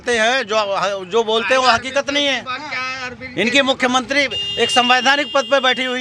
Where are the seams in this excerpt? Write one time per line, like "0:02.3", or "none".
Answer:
none